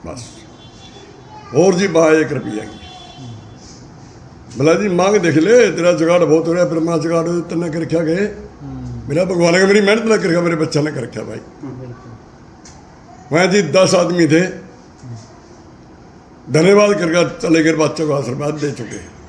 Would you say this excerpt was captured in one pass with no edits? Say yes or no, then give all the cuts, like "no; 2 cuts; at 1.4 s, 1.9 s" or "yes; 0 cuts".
yes; 0 cuts